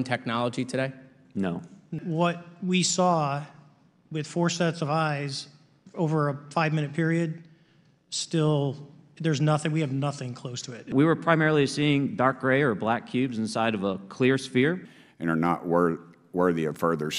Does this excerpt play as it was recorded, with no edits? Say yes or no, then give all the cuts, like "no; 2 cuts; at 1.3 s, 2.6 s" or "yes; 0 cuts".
no; 3 cuts; at 2.0 s, 10.9 s, 14.8 s